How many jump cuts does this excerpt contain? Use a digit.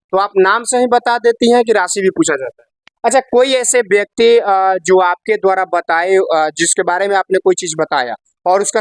1